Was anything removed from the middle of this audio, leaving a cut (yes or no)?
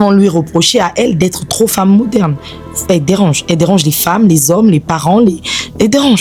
no